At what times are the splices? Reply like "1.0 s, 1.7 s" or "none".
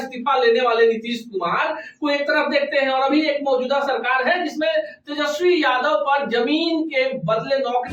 none